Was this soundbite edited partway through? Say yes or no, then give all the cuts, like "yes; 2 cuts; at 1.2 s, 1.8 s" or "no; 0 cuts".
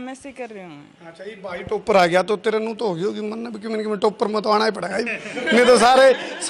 no; 0 cuts